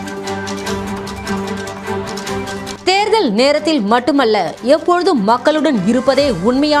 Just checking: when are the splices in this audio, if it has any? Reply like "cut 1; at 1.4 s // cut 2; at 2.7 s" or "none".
cut 1; at 2.7 s

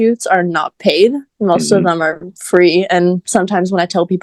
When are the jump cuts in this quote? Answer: none

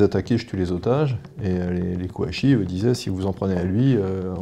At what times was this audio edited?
none

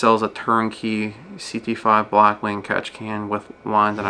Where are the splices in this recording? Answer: none

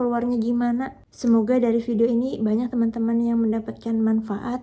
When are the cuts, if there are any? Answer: cut 1; at 0.9 s

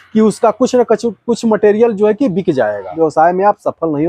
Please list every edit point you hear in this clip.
cut 1; at 2.9 s

